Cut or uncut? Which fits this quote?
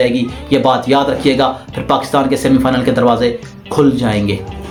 uncut